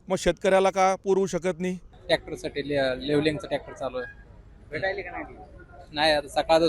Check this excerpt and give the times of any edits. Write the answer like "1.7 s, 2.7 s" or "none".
1.9 s